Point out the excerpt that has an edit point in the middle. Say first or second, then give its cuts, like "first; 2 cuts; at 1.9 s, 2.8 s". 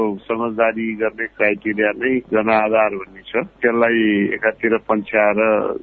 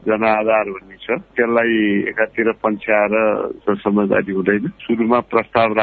second; 1 cut; at 4.8 s